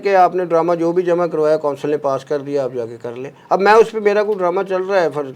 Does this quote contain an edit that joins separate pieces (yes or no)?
no